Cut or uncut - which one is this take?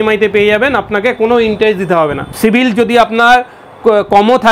cut